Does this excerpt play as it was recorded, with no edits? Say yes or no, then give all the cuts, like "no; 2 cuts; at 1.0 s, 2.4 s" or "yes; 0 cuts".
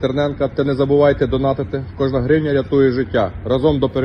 yes; 0 cuts